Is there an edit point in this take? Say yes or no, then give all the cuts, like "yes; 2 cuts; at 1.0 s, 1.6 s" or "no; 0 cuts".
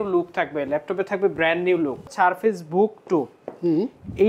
yes; 1 cut; at 2.1 s